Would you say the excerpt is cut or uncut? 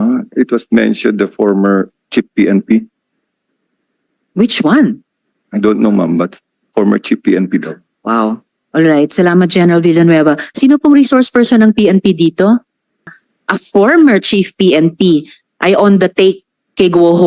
cut